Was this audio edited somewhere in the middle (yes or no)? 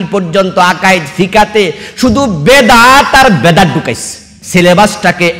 yes